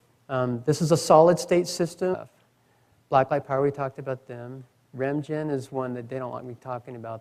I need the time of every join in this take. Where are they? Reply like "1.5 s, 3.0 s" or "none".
none